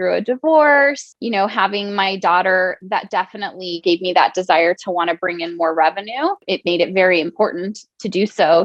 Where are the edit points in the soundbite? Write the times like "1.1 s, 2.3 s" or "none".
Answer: 1.1 s, 3.8 s, 6.4 s